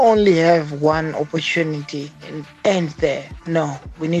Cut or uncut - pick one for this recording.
cut